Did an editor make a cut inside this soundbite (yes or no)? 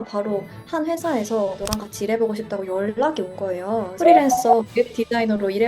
yes